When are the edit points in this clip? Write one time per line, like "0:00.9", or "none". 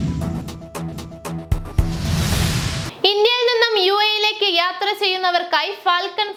none